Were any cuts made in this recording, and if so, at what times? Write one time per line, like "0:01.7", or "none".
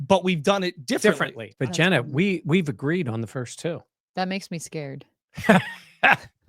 0:01.4